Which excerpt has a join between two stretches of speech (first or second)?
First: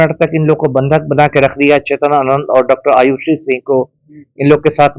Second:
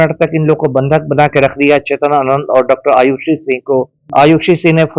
second